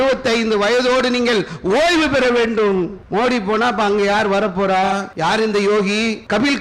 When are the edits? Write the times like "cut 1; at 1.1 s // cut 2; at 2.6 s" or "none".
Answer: cut 1; at 3.0 s // cut 2; at 5.1 s